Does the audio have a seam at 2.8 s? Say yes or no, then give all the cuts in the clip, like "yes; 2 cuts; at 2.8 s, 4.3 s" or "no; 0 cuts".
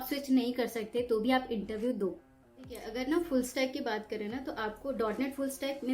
yes; 1 cut; at 2.8 s